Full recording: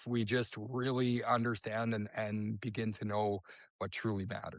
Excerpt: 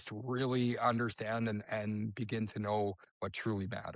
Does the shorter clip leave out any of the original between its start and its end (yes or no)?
yes